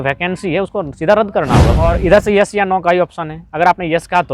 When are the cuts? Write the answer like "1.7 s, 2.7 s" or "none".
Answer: 1.8 s